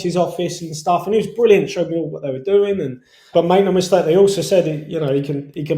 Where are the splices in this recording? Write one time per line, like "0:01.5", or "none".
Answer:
0:03.2